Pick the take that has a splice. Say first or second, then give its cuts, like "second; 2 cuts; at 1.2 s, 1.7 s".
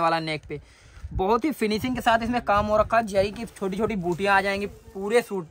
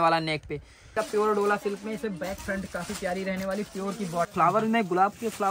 second; 2 cuts; at 1.0 s, 4.3 s